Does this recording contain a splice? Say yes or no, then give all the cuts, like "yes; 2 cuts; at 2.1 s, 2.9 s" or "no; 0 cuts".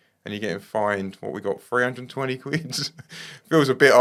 no; 0 cuts